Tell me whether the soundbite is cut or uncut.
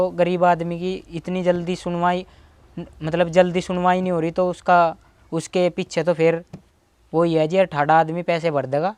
uncut